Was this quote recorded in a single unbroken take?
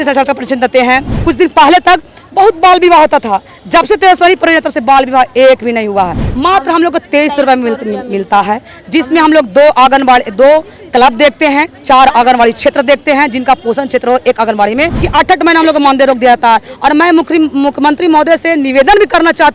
no; 3 cuts; at 1.1 s, 6.2 s, 15.1 s

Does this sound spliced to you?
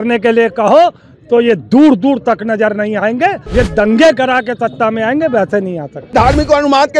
yes; 2 cuts; at 3.4 s, 6.0 s

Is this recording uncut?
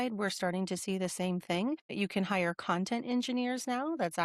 no; 1 cut; at 1.9 s

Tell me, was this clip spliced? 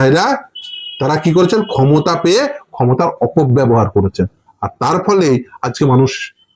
no; 0 cuts

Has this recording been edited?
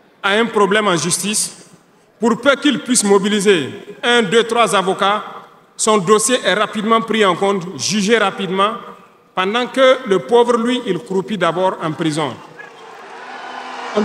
no; 0 cuts

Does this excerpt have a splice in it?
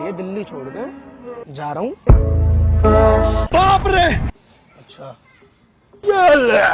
yes; 1 cut; at 3.4 s

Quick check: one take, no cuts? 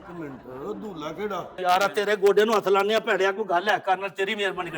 no; 1 cut; at 1.6 s

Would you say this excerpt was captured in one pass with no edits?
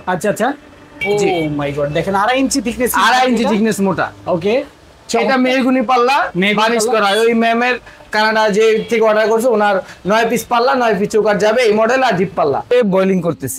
no; 2 cuts; at 0.9 s, 12.7 s

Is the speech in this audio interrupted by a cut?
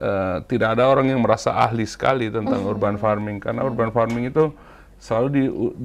no; 0 cuts

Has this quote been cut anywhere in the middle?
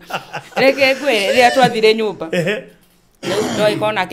no; 0 cuts

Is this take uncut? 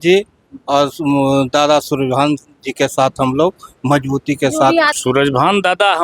no; 1 cut; at 4.9 s

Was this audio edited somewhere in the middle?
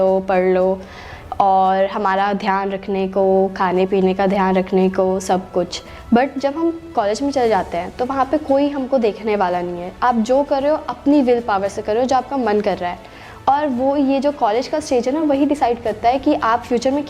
no; 0 cuts

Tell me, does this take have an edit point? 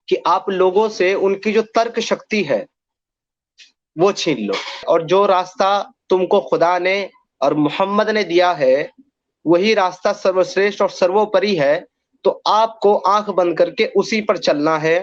yes; 1 cut; at 4.8 s

